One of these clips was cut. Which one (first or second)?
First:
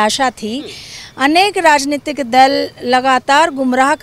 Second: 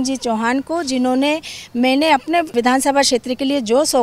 second